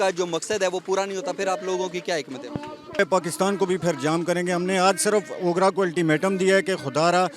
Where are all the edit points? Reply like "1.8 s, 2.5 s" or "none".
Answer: 3.0 s